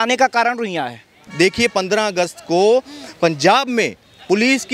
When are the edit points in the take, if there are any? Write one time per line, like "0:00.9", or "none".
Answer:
0:01.2